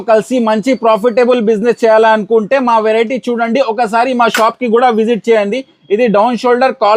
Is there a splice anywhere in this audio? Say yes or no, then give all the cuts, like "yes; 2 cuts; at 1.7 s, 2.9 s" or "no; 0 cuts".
no; 0 cuts